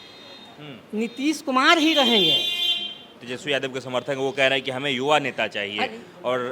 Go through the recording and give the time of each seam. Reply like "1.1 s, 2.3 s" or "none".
3.2 s